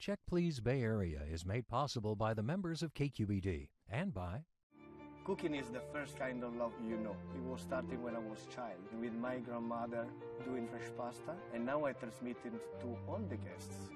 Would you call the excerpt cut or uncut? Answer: uncut